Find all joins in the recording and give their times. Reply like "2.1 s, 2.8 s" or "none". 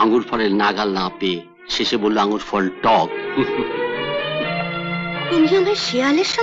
none

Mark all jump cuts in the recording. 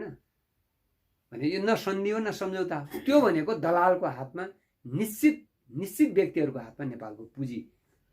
2.9 s

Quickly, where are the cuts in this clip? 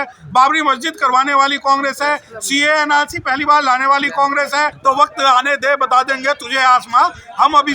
4.8 s

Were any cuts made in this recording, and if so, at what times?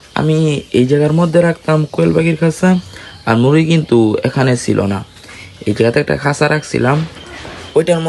none

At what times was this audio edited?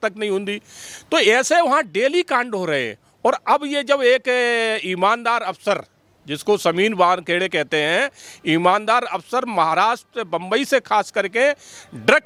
none

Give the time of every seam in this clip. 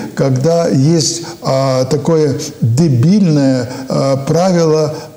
none

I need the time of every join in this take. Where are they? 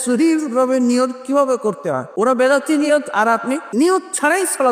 2.1 s, 3.6 s

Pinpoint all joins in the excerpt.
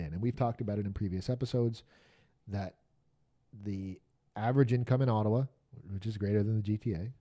none

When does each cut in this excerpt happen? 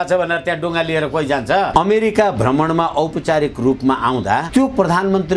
1.7 s, 4.5 s

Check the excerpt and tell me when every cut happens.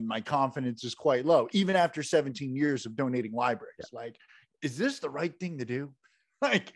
none

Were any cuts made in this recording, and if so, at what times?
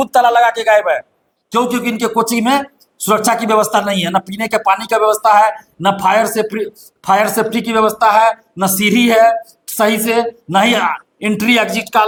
none

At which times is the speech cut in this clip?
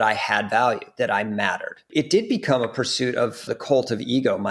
1.8 s, 3.5 s

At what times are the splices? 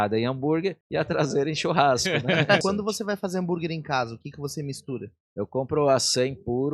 0.8 s, 2.6 s, 5.2 s

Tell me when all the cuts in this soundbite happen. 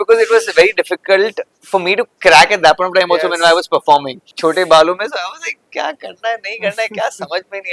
4.2 s

